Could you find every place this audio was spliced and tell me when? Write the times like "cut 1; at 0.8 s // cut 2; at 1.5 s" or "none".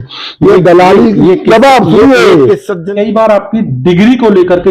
cut 1; at 2.7 s

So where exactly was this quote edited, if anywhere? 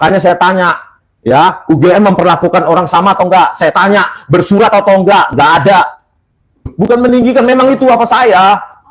cut 1; at 6.7 s

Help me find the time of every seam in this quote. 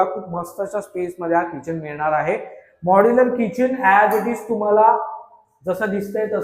none

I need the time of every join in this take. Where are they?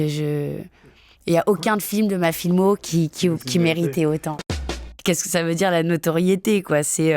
cut 1; at 4.7 s

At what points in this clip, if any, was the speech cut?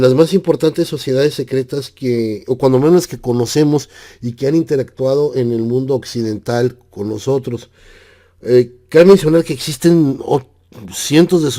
cut 1; at 3.1 s

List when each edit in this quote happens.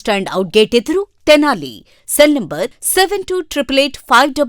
none

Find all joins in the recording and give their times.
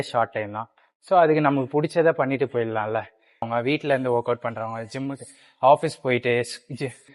cut 1; at 3.5 s

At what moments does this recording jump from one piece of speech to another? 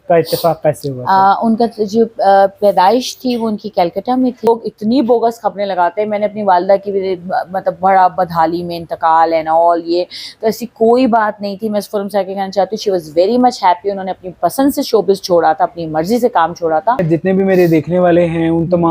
cut 1; at 4.5 s // cut 2; at 17.0 s

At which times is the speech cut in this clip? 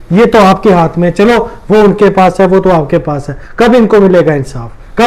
none

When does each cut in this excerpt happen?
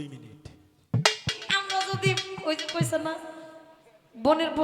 cut 1; at 1.3 s

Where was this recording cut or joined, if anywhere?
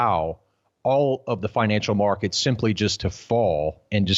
none

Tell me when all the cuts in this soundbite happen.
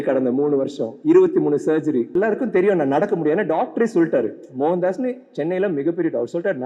cut 1; at 2.1 s

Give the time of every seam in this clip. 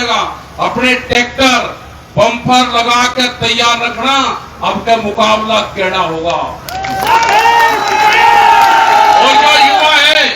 none

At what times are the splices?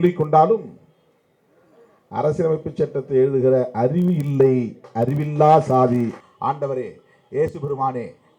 cut 1; at 6.1 s

